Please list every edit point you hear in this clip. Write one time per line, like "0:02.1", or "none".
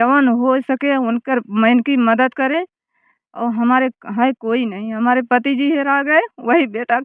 none